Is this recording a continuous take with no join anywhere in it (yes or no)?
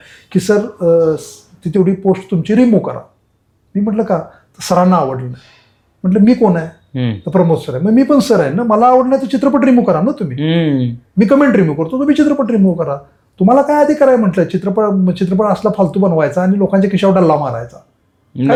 yes